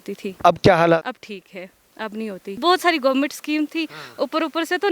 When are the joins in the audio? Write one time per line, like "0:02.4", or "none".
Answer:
0:01.0
0:02.6